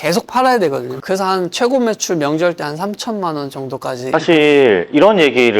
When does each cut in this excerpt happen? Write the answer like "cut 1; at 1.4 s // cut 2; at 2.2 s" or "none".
cut 1; at 0.9 s // cut 2; at 4.0 s